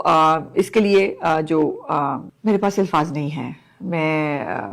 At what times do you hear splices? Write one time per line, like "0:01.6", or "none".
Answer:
0:02.3